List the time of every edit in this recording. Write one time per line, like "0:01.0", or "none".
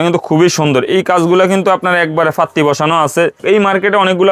0:03.4